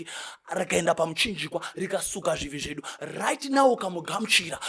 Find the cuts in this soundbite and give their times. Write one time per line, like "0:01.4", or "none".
none